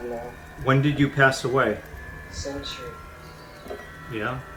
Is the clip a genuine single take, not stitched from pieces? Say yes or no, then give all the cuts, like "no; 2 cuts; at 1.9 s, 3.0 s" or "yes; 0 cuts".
yes; 0 cuts